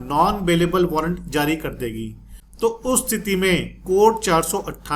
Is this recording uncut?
no; 1 cut; at 2.4 s

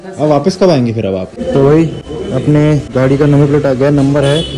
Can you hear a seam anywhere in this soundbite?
yes; 2 cuts; at 1.4 s, 2.6 s

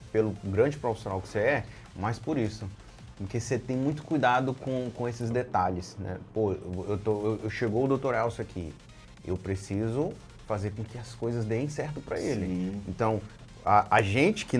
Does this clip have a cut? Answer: no; 0 cuts

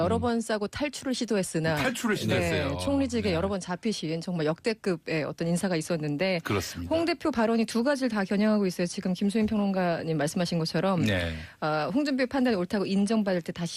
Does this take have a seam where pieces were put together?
yes; 1 cut; at 4.4 s

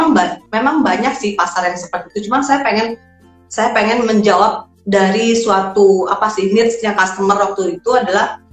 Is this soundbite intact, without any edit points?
yes; 0 cuts

